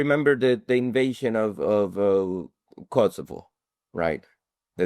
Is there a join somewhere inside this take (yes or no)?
no